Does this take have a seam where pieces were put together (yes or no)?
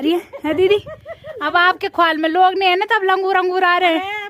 no